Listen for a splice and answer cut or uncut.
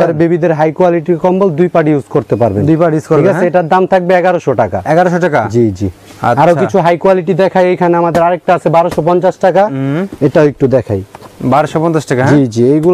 uncut